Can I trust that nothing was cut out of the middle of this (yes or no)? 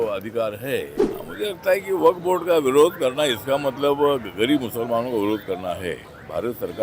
no